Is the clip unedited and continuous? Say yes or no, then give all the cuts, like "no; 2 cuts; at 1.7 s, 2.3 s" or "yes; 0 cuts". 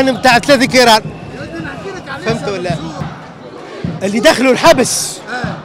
yes; 0 cuts